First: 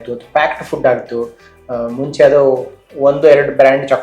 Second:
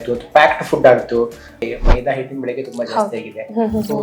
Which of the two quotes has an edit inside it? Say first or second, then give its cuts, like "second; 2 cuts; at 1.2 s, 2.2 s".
second; 1 cut; at 1.6 s